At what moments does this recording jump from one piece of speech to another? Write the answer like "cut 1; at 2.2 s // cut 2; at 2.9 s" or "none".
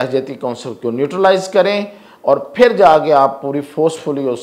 none